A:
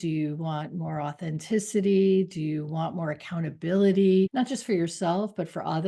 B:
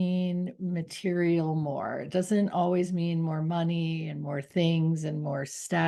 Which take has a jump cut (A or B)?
A